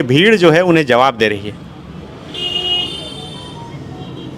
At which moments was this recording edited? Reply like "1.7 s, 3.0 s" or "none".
none